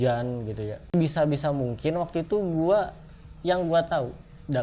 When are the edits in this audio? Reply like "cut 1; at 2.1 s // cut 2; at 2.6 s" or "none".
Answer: cut 1; at 0.9 s